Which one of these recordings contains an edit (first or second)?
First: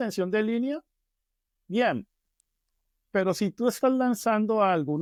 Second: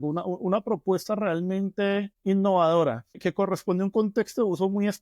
second